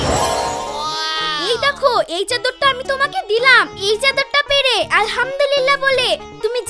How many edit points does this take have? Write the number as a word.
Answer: zero